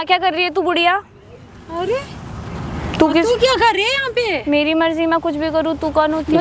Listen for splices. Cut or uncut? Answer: uncut